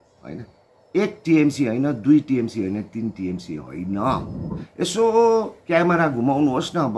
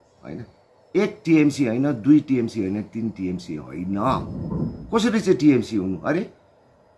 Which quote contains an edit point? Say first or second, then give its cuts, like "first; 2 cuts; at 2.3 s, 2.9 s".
first; 1 cut; at 4.5 s